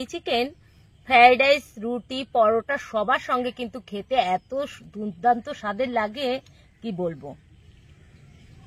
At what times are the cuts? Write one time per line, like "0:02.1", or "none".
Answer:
none